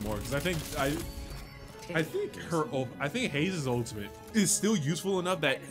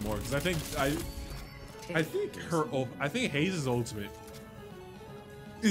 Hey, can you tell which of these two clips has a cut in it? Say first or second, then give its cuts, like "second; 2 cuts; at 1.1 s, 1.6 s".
first; 1 cut; at 4.2 s